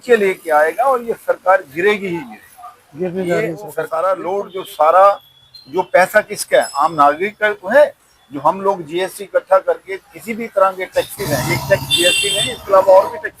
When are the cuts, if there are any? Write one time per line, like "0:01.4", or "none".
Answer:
0:03.9